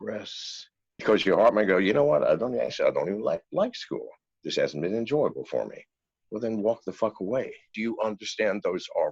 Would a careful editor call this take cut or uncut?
cut